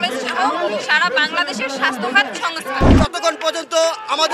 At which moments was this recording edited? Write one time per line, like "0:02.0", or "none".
0:02.9